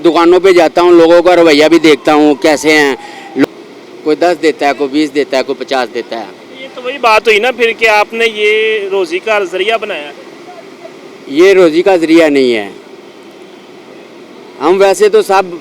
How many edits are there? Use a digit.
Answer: 1